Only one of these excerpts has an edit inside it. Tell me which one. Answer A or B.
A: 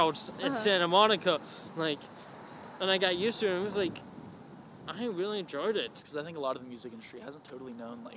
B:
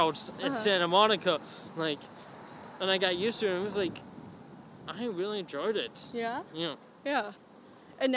A